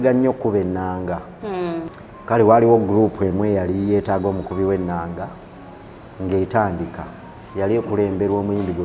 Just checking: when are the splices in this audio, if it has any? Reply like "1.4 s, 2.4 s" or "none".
1.9 s